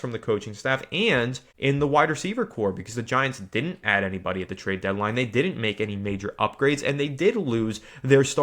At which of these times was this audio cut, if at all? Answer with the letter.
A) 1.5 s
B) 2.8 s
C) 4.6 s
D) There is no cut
A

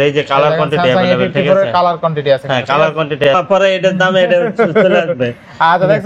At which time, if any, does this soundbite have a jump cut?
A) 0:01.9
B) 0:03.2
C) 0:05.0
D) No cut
B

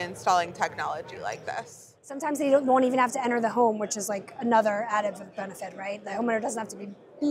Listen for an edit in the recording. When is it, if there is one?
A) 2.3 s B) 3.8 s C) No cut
A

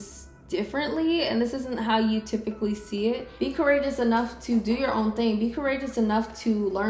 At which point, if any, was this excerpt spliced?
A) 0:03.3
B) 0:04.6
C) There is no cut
A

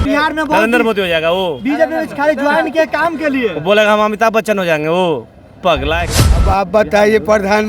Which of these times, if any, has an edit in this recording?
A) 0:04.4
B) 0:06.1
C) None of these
B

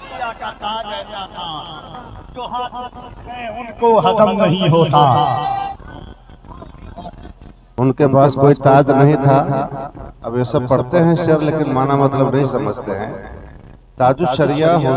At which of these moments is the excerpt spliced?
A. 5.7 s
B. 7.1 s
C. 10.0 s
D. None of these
A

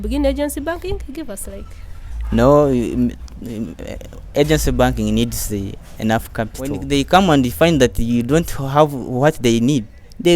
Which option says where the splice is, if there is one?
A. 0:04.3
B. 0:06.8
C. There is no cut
B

